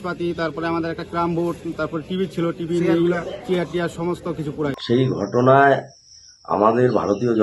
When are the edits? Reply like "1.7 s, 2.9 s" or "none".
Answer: 4.6 s